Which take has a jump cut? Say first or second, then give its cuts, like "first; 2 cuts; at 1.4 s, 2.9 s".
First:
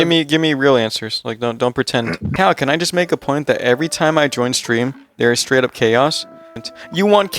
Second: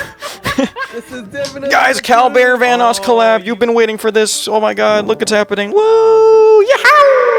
first; 2 cuts; at 2.2 s, 6.5 s